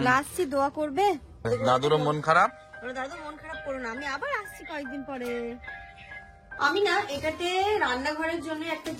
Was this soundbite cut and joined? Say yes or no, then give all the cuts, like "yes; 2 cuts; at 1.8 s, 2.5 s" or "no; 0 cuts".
yes; 2 cuts; at 1.5 s, 6.6 s